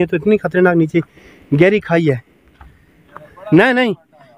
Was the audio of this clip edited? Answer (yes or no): no